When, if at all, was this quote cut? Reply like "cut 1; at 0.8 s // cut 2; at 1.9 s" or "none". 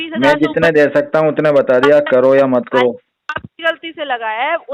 cut 1; at 3.1 s